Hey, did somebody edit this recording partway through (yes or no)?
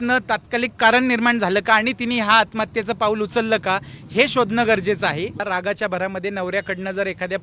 yes